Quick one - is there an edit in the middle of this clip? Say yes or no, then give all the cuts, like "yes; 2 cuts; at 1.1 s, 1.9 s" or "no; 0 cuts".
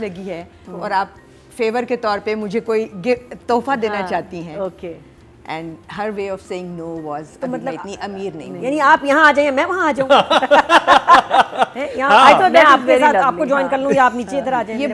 no; 0 cuts